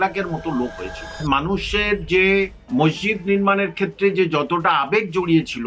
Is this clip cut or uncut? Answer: cut